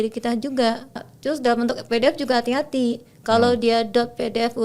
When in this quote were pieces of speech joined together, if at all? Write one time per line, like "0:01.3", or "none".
0:01.0